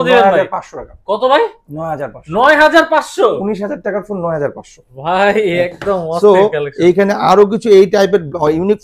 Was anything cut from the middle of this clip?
no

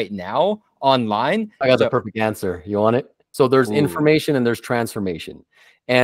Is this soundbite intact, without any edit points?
no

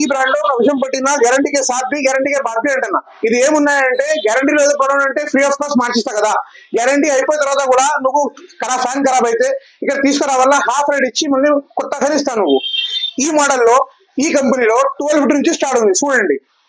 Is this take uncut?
yes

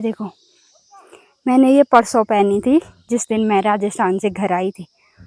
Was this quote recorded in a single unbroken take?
yes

